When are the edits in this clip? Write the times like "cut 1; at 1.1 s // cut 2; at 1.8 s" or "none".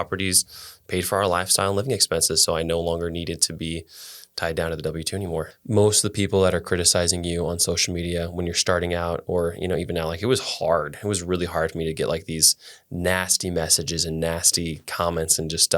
cut 1; at 5.5 s